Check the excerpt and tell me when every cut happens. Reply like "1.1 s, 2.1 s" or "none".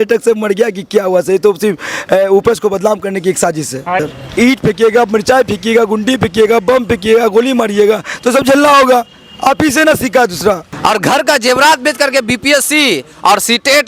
3.9 s, 10.7 s